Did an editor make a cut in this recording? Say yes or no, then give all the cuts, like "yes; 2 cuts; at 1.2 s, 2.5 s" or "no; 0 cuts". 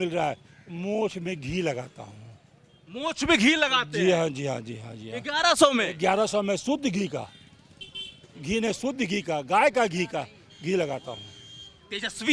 no; 0 cuts